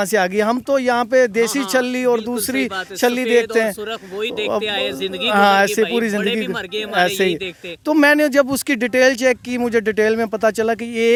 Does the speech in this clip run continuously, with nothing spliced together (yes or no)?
yes